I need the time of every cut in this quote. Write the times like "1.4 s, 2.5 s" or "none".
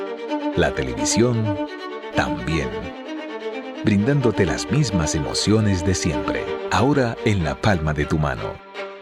none